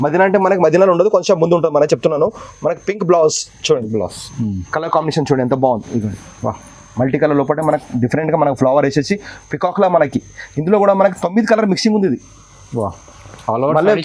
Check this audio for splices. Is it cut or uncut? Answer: uncut